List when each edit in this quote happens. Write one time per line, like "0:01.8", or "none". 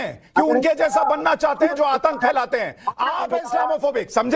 none